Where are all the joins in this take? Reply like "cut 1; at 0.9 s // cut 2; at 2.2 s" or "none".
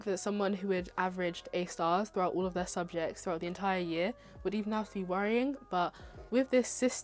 none